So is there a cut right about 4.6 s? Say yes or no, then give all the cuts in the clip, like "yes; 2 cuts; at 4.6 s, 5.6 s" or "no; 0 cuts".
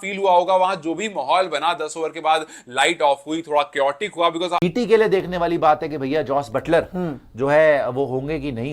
yes; 1 cut; at 4.6 s